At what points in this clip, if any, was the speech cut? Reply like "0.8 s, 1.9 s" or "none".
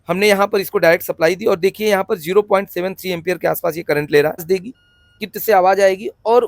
4.4 s